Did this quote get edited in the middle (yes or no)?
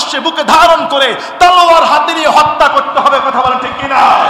no